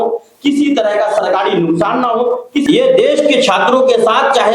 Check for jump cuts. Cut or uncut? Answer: cut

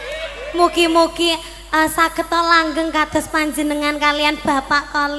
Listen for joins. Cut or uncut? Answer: uncut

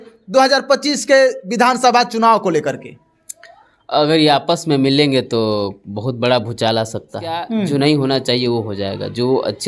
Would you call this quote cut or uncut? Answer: cut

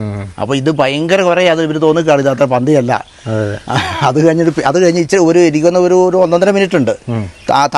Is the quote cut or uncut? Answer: uncut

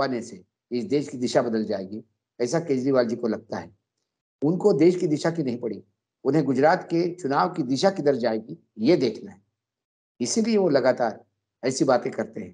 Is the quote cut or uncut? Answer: uncut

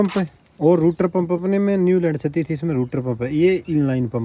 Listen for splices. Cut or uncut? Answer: uncut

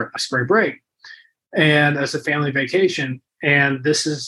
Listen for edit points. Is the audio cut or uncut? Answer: uncut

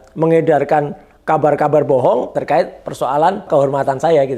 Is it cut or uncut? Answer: cut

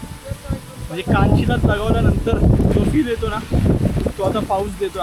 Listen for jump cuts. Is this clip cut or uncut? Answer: uncut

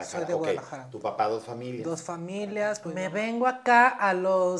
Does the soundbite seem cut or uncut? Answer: cut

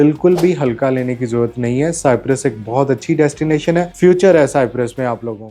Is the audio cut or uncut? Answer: uncut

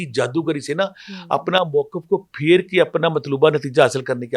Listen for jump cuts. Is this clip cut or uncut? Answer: uncut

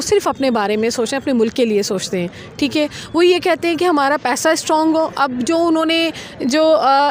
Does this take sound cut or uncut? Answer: uncut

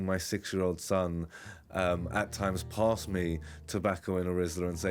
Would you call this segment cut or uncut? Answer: uncut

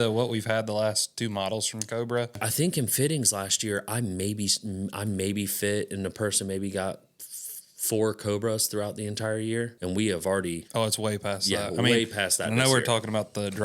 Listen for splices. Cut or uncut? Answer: cut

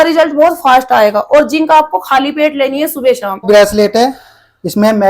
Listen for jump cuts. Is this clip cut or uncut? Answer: cut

